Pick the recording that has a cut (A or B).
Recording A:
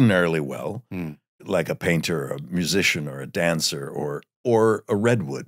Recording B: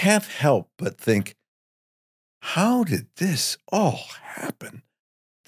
A